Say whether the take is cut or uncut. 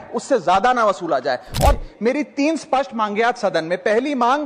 cut